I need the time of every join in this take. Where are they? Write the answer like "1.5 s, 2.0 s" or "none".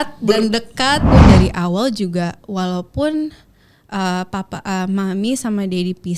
1.1 s